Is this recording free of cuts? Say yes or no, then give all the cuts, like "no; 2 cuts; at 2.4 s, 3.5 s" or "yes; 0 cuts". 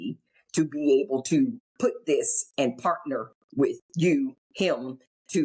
no; 2 cuts; at 1.6 s, 4.4 s